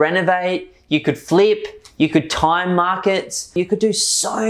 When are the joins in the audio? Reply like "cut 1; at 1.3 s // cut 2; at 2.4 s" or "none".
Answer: cut 1; at 3.6 s